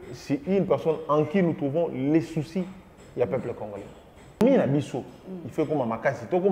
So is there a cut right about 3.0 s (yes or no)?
no